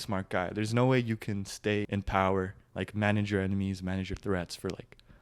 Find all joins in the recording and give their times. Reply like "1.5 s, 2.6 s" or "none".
1.9 s